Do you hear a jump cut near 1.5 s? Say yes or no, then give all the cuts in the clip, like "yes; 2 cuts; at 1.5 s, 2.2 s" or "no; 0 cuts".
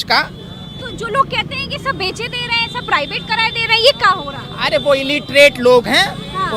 no; 0 cuts